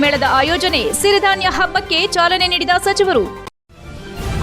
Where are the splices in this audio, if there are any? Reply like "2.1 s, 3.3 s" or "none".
3.5 s